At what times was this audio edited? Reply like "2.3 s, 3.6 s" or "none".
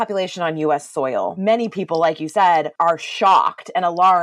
1.3 s, 2.7 s